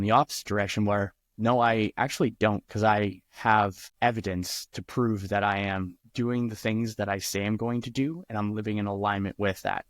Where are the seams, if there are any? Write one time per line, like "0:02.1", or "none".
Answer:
0:03.8